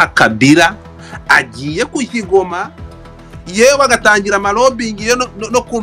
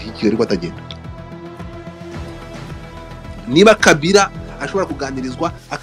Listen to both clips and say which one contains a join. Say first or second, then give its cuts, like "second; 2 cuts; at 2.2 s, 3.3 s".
second; 2 cuts; at 1.3 s, 3.3 s